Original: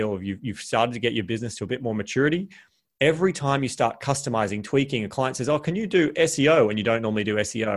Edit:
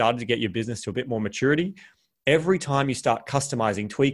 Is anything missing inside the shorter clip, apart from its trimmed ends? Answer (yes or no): no